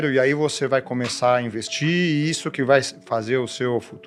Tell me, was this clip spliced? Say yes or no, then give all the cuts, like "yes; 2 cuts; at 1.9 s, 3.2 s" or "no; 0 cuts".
no; 0 cuts